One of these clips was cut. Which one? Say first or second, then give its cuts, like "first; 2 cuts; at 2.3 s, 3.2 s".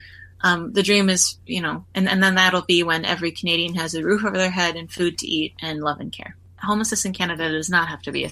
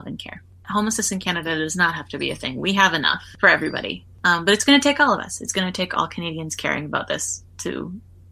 second; 1 cut; at 4.2 s